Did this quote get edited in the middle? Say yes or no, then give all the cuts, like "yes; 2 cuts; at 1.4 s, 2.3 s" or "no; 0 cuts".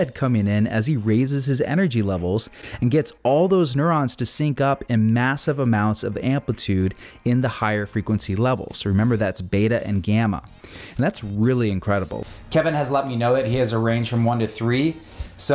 yes; 1 cut; at 12.2 s